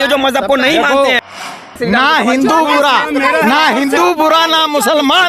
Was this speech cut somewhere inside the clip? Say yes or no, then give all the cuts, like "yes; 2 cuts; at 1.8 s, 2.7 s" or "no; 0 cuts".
yes; 1 cut; at 1.4 s